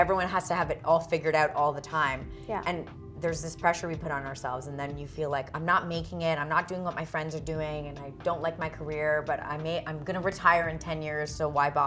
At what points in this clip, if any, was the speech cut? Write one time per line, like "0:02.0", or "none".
none